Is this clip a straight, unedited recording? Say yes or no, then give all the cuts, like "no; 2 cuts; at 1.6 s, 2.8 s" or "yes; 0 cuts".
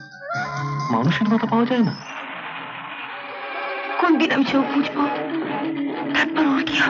yes; 0 cuts